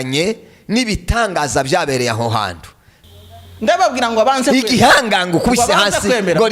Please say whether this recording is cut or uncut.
cut